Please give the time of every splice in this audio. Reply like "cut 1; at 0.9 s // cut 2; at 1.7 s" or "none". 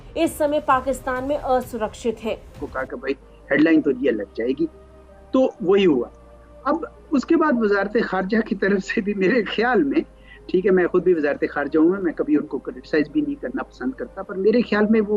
cut 1; at 2.7 s